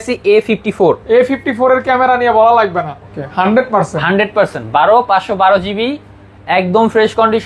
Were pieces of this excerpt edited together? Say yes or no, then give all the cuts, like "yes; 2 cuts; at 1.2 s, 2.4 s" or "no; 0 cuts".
yes; 1 cut; at 3.2 s